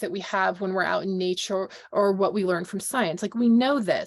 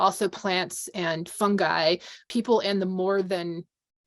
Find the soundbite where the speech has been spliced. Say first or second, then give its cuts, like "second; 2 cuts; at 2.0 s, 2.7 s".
second; 1 cut; at 2.3 s